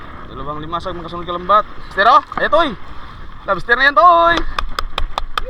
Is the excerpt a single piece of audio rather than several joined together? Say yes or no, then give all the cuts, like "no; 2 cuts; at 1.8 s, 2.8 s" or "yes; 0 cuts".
no; 1 cut; at 1.9 s